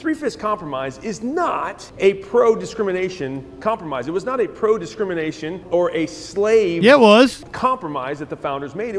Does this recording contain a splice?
yes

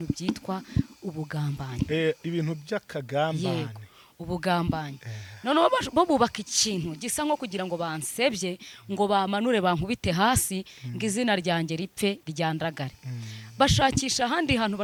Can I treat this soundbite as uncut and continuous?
yes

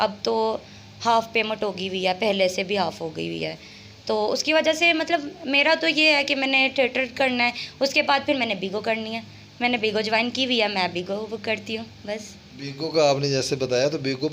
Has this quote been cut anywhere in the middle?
no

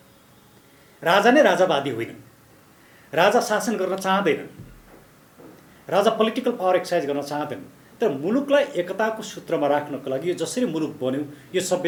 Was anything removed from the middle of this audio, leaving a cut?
no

